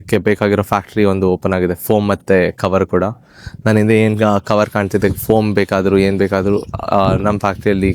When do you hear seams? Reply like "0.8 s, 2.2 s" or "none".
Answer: none